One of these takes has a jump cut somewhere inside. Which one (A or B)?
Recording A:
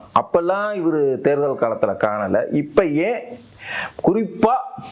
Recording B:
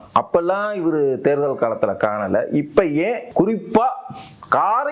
B